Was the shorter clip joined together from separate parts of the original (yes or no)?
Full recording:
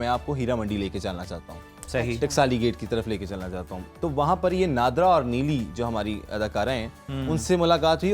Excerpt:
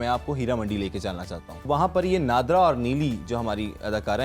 yes